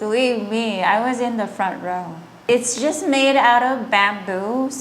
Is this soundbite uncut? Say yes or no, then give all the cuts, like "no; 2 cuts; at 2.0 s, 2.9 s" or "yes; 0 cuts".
no; 1 cut; at 2.4 s